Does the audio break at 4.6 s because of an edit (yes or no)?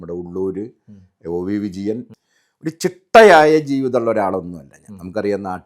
no